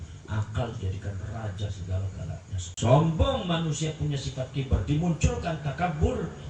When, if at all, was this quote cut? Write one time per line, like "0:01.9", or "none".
0:02.6